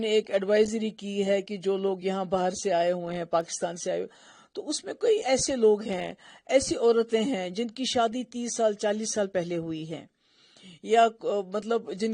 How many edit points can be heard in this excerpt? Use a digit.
0